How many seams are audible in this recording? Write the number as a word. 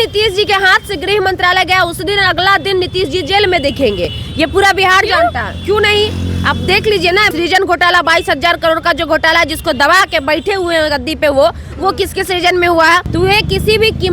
two